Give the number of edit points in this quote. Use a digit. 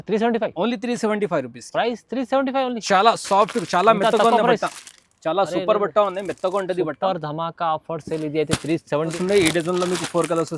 1